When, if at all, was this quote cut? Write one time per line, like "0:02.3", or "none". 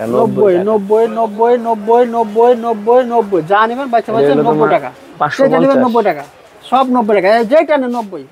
none

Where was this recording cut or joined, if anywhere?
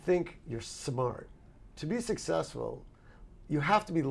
0:01.7

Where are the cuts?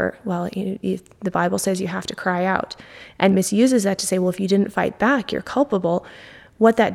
0:03.3

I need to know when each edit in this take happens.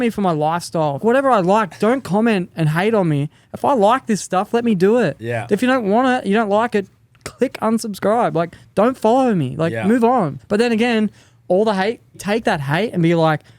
0:01.0
0:10.4
0:12.2

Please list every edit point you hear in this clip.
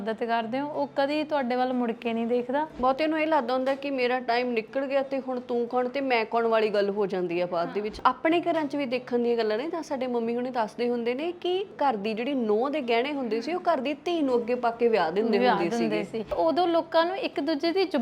0:02.7
0:08.0
0:11.7
0:16.3

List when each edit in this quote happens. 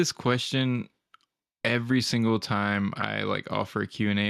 none

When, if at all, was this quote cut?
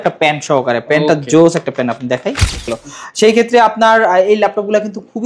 0:02.7

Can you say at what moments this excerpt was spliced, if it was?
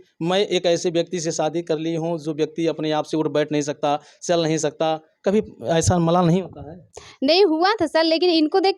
none

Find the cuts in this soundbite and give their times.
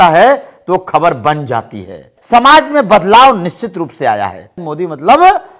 0:02.1
0:04.7

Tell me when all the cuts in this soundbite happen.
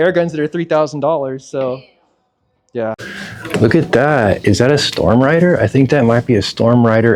0:03.1

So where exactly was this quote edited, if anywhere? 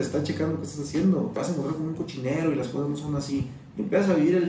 0:01.4

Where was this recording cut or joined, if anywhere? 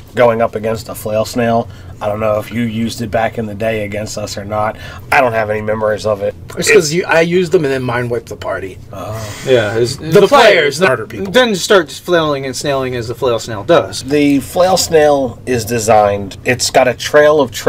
none

